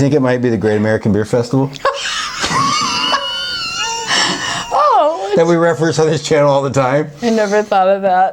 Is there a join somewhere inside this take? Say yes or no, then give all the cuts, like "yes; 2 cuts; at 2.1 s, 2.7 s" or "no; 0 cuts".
no; 0 cuts